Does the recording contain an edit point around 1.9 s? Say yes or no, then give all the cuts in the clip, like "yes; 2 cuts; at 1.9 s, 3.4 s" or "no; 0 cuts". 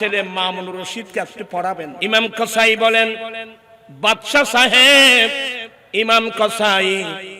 yes; 1 cut; at 1.9 s